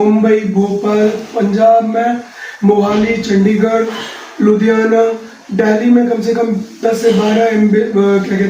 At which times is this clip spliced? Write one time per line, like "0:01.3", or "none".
none